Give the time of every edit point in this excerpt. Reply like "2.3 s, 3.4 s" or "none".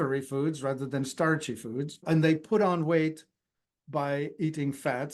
2.0 s